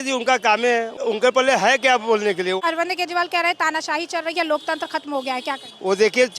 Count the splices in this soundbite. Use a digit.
2